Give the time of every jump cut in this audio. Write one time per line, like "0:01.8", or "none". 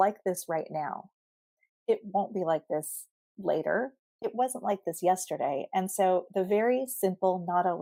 none